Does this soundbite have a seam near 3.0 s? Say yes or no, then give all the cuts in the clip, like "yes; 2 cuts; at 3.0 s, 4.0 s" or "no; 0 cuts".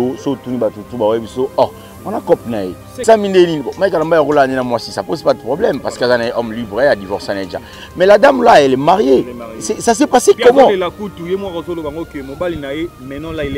yes; 1 cut; at 3.0 s